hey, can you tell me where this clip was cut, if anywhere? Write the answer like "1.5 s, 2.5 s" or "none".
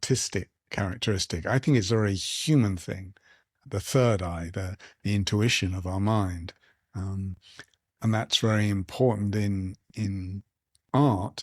3.6 s